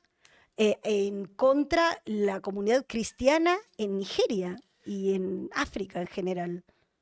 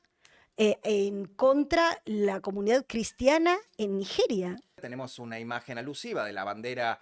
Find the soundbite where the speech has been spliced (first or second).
second